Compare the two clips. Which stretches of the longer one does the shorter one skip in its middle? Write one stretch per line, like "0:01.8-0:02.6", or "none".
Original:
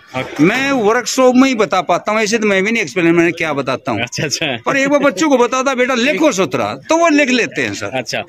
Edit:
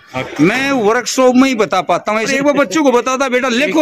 0:02.3-0:04.8